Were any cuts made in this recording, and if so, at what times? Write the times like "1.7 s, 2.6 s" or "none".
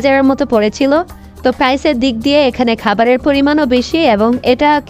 none